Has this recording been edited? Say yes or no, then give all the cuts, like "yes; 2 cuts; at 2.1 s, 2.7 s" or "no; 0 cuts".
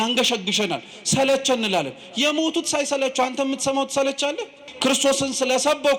yes; 1 cut; at 4.7 s